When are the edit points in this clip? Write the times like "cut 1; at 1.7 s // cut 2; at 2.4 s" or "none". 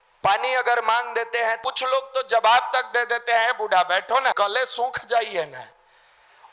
cut 1; at 1.6 s // cut 2; at 4.4 s